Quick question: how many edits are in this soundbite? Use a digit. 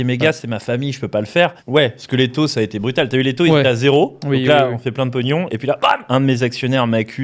2